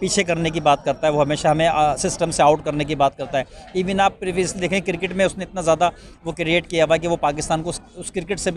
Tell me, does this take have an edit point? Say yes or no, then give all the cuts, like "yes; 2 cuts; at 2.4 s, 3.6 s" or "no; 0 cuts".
no; 0 cuts